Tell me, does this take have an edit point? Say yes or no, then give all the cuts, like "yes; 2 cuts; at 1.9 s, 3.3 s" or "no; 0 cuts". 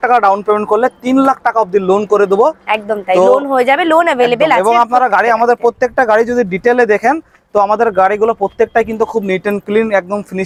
no; 0 cuts